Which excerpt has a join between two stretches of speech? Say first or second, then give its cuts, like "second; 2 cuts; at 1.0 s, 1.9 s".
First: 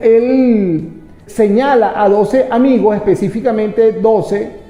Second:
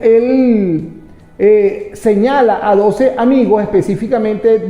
first; 1 cut; at 1.2 s